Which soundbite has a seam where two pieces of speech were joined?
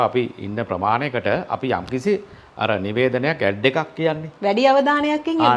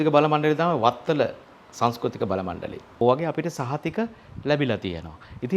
second; 1 cut; at 2.8 s

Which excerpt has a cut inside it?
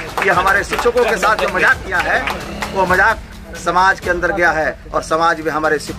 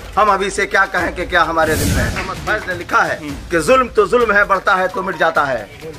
second; 1 cut; at 2.3 s

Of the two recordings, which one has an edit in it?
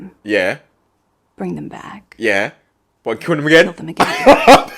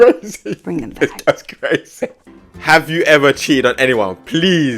second; 1 cut; at 2.2 s

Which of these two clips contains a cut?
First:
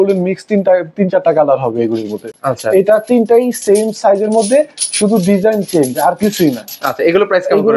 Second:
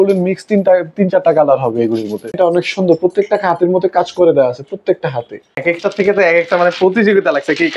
second; 2 cuts; at 2.3 s, 5.6 s

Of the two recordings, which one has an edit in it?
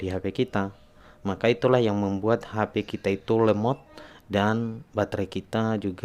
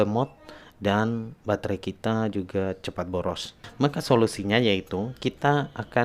second; 1 cut; at 3.6 s

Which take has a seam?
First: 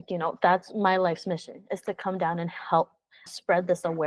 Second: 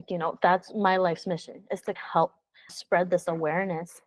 second; 1 cut; at 2.0 s

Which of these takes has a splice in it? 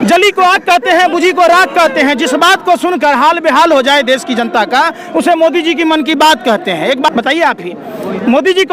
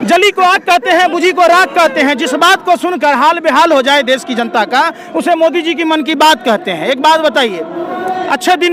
first; 1 cut; at 7.1 s

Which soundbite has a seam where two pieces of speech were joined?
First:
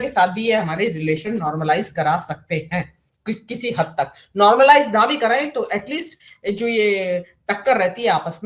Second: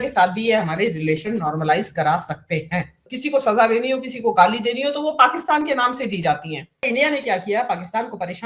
second; 2 cuts; at 3.1 s, 6.9 s

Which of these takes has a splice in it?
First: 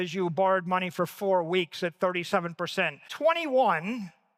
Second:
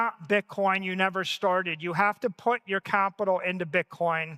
first; 1 cut; at 3.0 s

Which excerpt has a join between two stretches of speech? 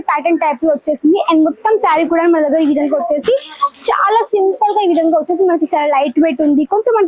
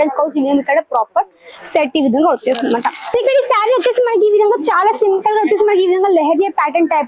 second; 1 cut; at 3.0 s

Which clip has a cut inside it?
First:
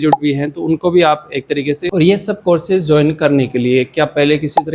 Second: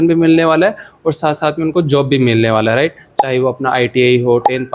first; 1 cut; at 1.8 s

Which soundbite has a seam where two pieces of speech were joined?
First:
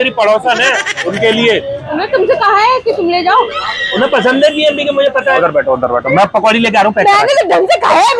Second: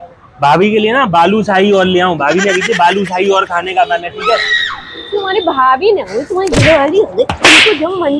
first; 4 cuts; at 0.9 s, 1.8 s, 3.7 s, 5.4 s

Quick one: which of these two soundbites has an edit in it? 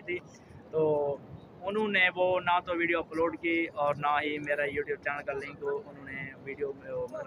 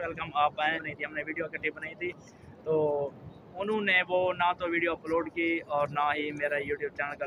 second; 1 cut; at 0.9 s

